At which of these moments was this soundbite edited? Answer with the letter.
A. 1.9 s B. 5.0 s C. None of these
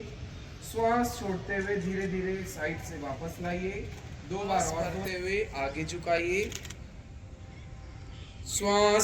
B